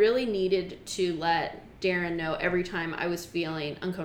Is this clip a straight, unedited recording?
yes; 0 cuts

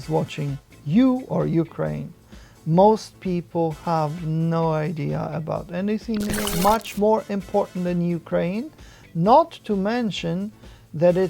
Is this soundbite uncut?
no; 1 cut; at 6.5 s

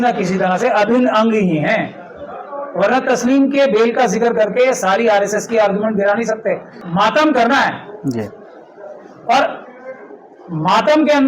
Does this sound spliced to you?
yes; 1 cut; at 6.7 s

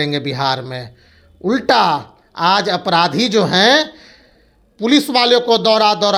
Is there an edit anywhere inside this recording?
no; 0 cuts

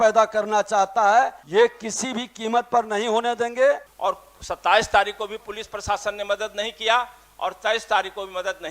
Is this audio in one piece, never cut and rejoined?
no; 2 cuts; at 1.4 s, 3.9 s

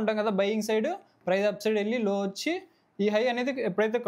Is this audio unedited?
yes; 0 cuts

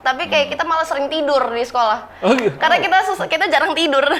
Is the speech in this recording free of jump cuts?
yes; 0 cuts

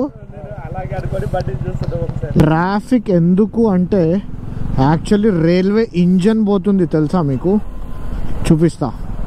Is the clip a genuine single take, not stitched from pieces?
no; 1 cut; at 2.4 s

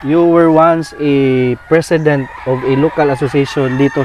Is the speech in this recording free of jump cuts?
yes; 0 cuts

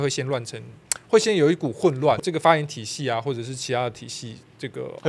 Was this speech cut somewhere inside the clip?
yes; 1 cut; at 2.2 s

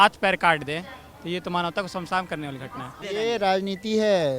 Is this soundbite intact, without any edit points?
no; 1 cut; at 3.0 s

